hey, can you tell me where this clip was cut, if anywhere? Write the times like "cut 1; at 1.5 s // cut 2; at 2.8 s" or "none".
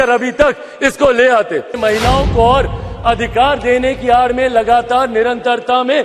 cut 1; at 1.8 s